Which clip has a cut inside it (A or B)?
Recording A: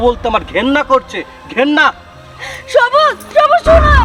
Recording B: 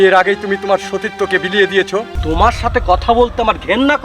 B